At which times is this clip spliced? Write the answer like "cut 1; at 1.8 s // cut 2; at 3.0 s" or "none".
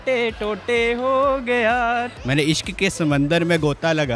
cut 1; at 2.1 s